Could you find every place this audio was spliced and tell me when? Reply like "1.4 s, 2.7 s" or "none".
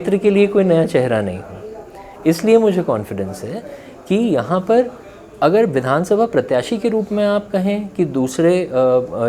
none